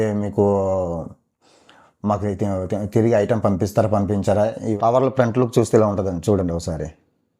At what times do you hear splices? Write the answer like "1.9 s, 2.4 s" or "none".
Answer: 4.6 s